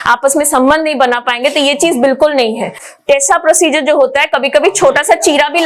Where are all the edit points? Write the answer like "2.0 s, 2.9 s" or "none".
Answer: none